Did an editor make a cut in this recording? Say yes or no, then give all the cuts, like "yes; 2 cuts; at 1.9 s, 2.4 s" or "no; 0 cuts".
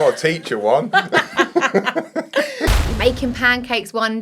yes; 1 cut; at 2.7 s